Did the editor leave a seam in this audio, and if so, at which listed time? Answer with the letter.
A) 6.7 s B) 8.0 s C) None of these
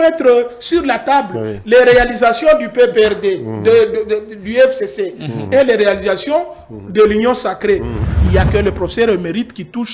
B